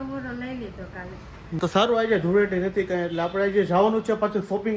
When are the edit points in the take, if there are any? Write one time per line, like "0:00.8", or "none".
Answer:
0:01.6